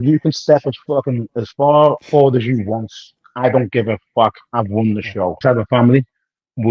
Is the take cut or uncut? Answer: cut